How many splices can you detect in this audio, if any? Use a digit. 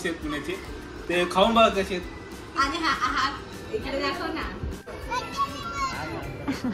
1